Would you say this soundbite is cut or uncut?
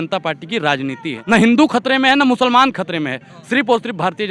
cut